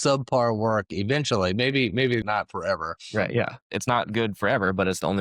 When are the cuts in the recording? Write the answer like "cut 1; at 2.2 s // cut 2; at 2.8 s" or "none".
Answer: cut 1; at 2.2 s // cut 2; at 3.6 s